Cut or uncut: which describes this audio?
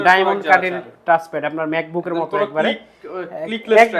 uncut